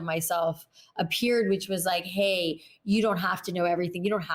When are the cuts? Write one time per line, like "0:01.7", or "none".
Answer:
none